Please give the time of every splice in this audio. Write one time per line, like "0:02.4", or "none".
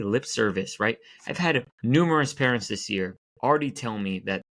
0:01.7
0:03.2

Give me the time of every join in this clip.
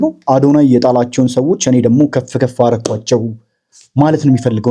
none

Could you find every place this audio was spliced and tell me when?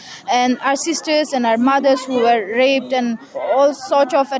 0:03.3

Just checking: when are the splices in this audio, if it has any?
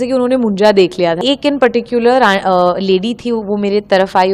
0:01.2

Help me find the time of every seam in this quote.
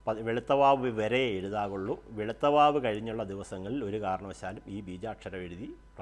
none

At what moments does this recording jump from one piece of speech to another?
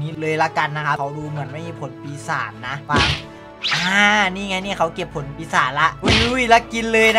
0:03.7

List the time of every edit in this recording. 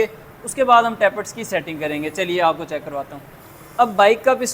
none

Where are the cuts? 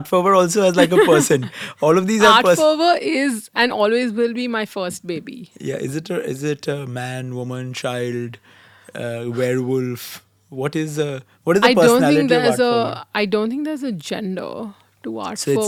none

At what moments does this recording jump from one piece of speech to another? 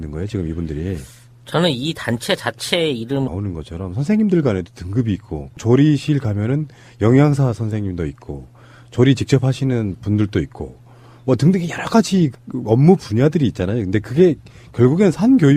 none

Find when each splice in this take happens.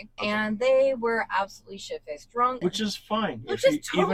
0:02.6

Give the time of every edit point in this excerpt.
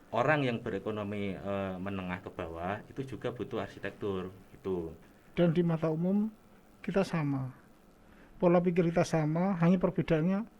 0:05.0

